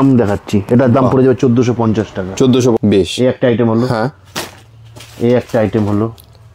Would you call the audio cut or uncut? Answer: cut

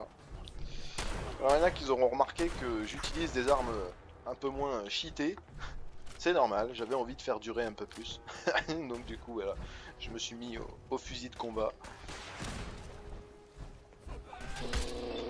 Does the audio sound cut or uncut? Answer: cut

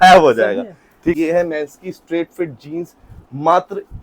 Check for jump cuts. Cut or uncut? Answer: cut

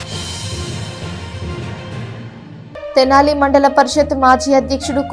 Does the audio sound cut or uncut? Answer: cut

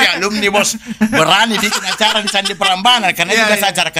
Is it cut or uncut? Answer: uncut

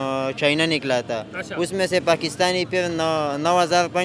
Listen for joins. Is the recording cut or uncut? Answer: uncut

